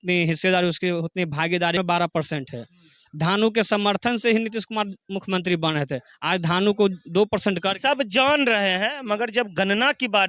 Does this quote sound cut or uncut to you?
cut